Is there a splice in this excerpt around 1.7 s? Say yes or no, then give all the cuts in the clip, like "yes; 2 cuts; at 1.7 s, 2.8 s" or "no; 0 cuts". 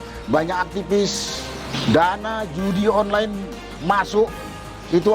yes; 1 cut; at 1.7 s